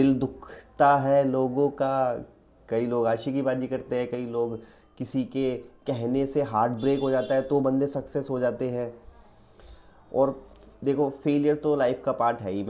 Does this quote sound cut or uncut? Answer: uncut